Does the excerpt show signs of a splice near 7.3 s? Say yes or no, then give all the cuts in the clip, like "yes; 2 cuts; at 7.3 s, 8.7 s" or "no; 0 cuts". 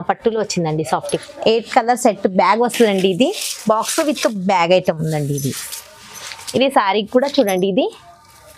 no; 1 cut; at 1.1 s